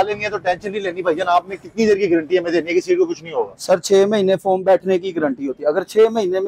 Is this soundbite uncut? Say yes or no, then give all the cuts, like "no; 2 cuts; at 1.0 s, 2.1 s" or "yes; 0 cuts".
yes; 0 cuts